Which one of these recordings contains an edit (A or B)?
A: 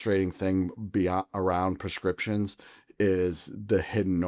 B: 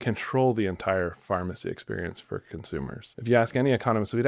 B